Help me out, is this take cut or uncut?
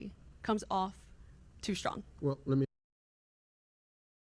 uncut